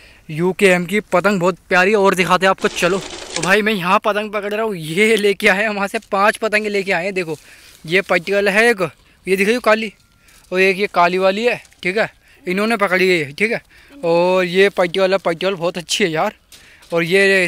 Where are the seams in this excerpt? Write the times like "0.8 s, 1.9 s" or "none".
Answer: none

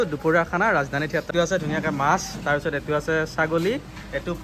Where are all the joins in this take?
1.3 s

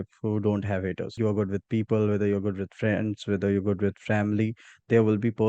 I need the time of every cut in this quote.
1.1 s

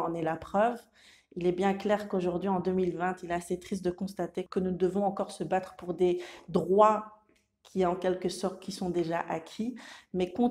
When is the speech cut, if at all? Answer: 4.5 s

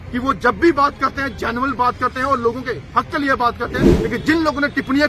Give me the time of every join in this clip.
3.9 s

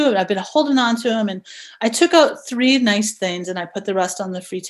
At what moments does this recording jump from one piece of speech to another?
none

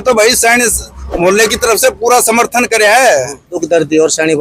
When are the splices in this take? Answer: 3.5 s

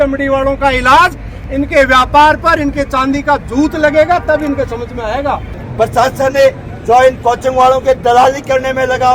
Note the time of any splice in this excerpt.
5.6 s

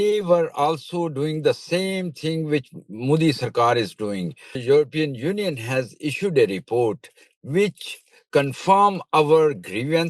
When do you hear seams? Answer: 4.6 s

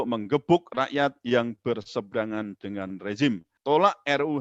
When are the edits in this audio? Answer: 3.5 s

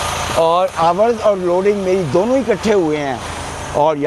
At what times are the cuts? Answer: none

